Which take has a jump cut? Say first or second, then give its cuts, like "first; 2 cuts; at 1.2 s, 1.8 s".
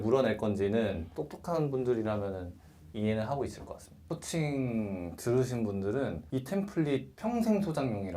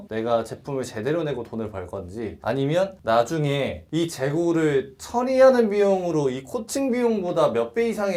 first; 2 cuts; at 1.1 s, 4.0 s